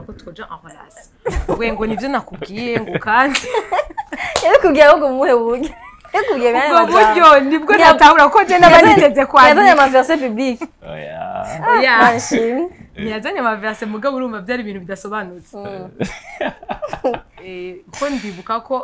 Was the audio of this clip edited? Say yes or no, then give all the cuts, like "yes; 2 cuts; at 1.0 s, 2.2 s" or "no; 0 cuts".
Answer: no; 0 cuts